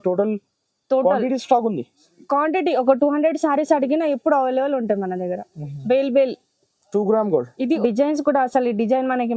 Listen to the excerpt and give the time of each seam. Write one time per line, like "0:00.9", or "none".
0:07.5